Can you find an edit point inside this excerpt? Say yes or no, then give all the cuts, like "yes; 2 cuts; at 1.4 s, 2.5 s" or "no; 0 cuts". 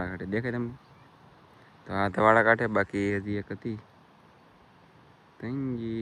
no; 0 cuts